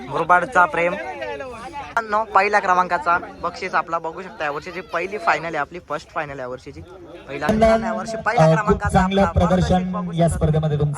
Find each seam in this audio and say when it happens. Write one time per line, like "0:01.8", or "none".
0:01.9
0:07.5